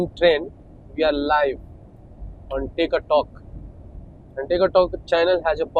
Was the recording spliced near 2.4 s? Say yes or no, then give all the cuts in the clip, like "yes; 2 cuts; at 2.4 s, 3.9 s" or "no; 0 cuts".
no; 0 cuts